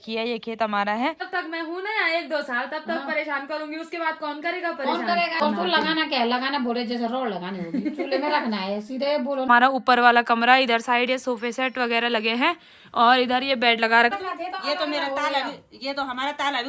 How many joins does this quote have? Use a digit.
4